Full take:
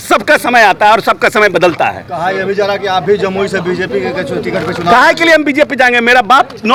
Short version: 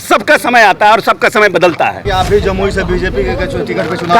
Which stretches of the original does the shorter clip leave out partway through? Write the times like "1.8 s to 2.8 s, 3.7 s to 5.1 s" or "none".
2.0 s to 2.8 s